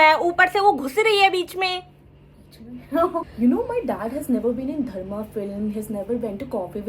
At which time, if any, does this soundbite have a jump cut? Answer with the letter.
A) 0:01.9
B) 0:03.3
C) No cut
B